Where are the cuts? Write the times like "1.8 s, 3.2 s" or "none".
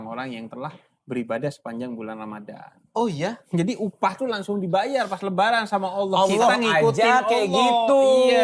none